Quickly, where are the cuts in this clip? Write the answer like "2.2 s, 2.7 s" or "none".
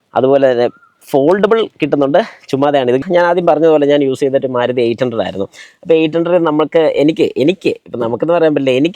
3.0 s